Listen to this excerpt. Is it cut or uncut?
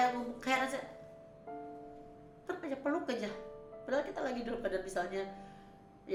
uncut